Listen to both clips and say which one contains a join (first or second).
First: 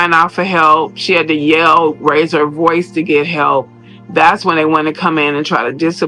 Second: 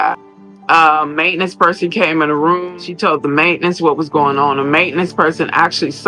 second